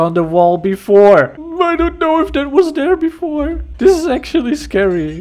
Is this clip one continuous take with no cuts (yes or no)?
no